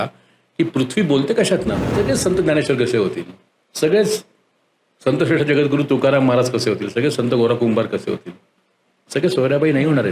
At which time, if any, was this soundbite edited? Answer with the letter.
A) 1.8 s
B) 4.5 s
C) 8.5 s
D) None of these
A